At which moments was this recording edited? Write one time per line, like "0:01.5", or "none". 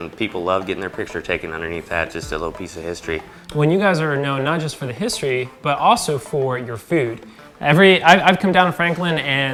none